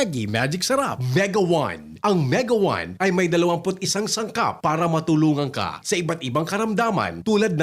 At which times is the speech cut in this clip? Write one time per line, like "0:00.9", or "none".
0:01.0